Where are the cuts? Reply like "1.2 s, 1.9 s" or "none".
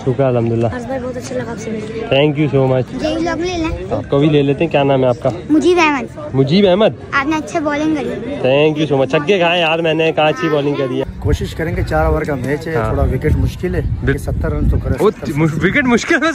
2.9 s, 11.0 s, 14.1 s

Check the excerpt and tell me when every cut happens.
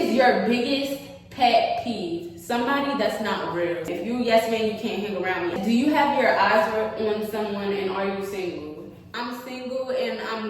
3.9 s, 5.6 s, 9.1 s

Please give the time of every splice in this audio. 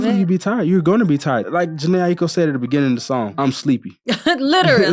1.5 s, 3.6 s

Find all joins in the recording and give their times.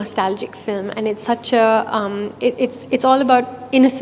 none

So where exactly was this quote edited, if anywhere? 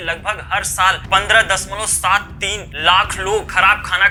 none

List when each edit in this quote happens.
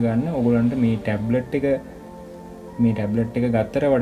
none

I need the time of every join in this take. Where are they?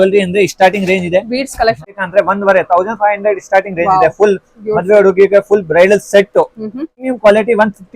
1.9 s, 7.0 s

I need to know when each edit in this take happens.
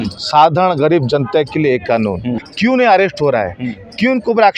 2.5 s

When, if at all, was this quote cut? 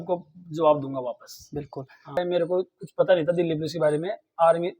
2.2 s

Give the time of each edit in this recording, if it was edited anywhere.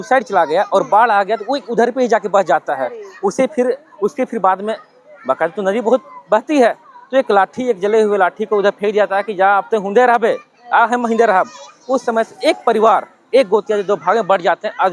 none

